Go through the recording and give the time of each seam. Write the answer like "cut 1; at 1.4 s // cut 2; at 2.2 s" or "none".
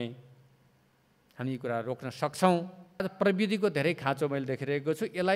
cut 1; at 3.0 s